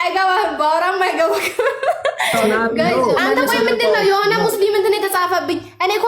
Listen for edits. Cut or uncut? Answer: cut